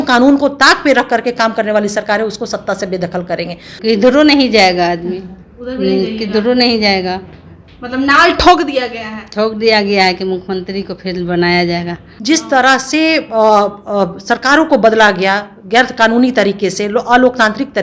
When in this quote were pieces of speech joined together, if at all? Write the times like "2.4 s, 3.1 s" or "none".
3.8 s, 12.1 s